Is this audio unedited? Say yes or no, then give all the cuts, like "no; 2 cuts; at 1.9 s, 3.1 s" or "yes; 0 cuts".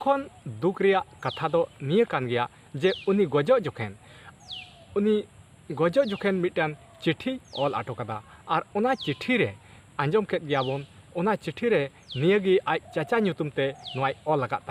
yes; 0 cuts